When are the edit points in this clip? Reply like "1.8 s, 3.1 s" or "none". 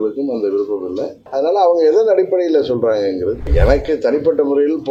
3.5 s